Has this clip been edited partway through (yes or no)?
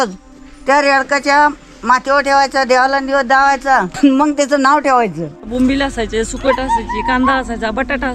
yes